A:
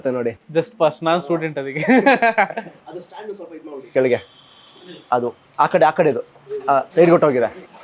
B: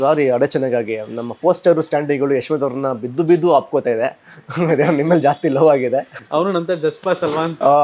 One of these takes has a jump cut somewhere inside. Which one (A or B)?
A